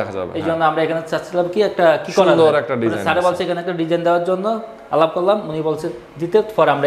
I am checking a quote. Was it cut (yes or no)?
no